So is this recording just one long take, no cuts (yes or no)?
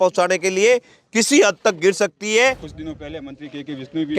no